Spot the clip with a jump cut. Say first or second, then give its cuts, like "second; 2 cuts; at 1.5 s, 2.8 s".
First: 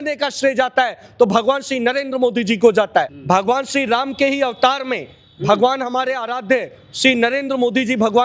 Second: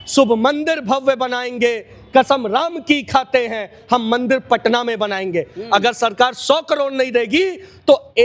first; 1 cut; at 3.1 s